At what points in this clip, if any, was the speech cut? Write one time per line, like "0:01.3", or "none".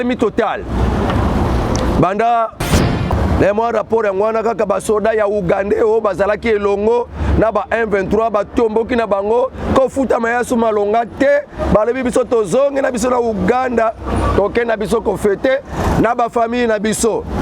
0:02.8